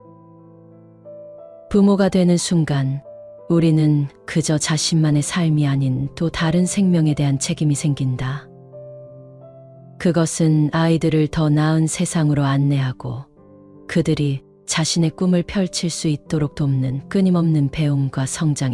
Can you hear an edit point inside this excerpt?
yes; 1 cut; at 1.7 s

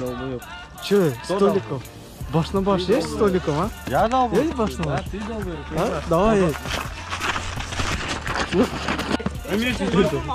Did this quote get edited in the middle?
yes; 1 cut; at 9.3 s

